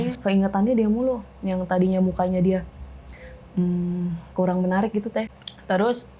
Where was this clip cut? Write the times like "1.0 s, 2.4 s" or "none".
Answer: 5.2 s